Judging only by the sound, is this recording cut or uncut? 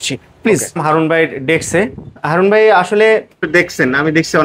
cut